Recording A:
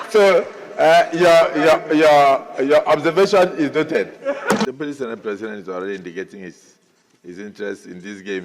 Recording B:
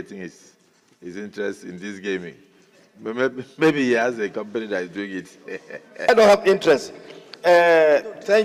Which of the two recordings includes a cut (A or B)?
A